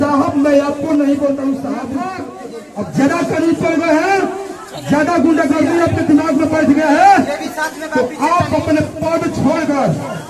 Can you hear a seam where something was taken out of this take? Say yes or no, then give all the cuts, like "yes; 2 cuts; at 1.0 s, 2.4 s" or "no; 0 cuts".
yes; 1 cut; at 2.3 s